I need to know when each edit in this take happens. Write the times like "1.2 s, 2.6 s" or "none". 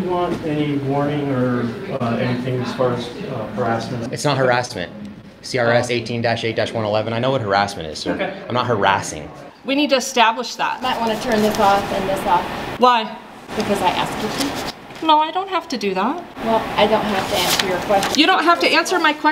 1.9 s, 4.1 s, 9.5 s